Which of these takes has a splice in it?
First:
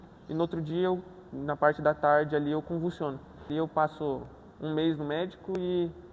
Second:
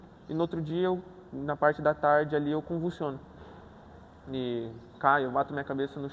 first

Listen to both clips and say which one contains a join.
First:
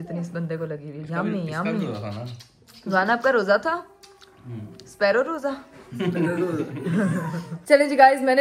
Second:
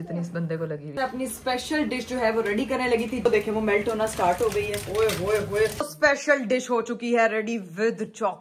second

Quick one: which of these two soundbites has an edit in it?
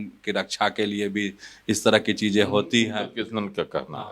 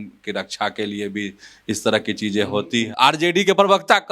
second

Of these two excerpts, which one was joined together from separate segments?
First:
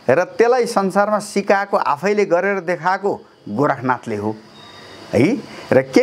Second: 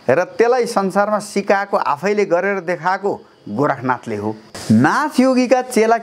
second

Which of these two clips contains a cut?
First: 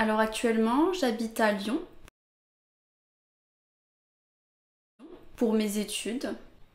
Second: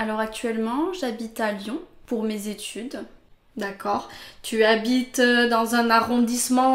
second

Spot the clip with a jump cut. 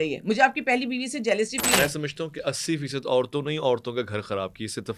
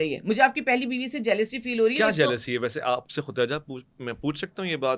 first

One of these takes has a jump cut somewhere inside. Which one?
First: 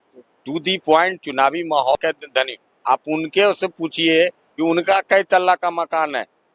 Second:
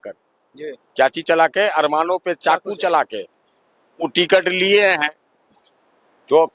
first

